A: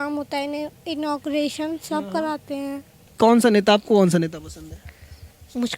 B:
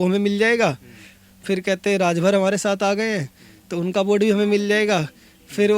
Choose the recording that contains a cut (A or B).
A